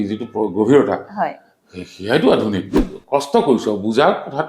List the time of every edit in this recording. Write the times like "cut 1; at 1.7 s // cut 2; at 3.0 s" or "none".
cut 1; at 2.9 s